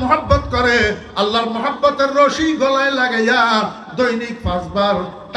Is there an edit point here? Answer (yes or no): no